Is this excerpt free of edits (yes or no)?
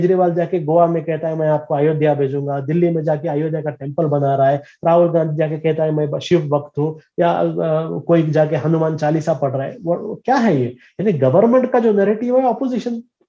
yes